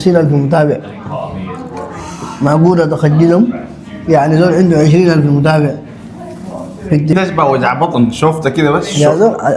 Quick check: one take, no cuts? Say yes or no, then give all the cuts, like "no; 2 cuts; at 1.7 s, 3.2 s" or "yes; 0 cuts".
no; 1 cut; at 7.1 s